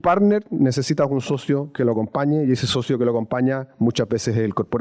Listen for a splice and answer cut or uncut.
uncut